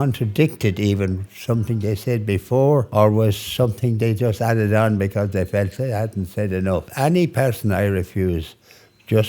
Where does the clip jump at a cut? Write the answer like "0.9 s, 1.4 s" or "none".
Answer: 2.9 s, 6.9 s